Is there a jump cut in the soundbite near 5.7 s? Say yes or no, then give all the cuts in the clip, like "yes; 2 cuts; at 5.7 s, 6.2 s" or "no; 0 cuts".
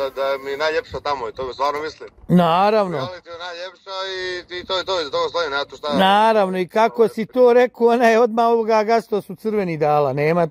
no; 0 cuts